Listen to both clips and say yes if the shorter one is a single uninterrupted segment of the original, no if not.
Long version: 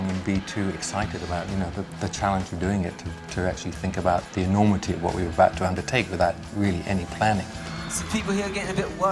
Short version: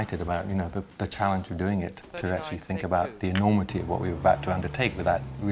no